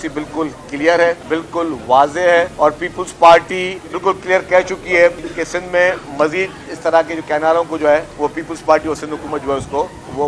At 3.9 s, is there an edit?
yes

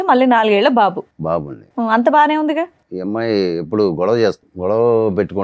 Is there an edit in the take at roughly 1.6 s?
no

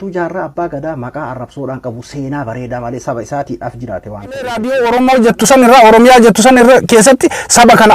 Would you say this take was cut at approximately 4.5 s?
yes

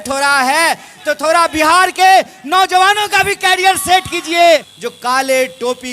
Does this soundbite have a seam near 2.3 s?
no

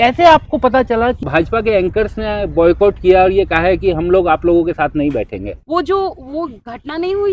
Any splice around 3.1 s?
no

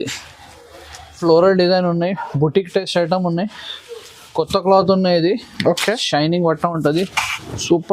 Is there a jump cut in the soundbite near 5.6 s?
no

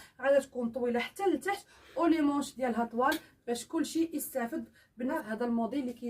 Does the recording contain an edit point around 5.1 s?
yes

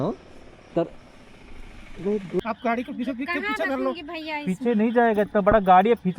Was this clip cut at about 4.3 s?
no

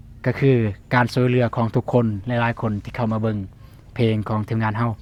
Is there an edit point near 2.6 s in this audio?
no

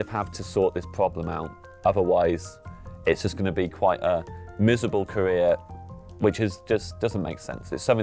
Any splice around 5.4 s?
no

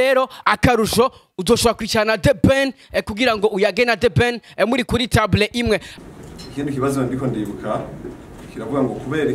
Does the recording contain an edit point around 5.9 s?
yes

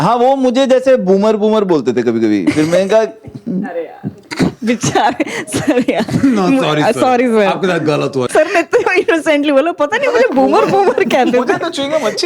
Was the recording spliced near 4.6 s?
no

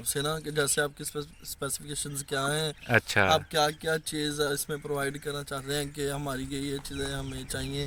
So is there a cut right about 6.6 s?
no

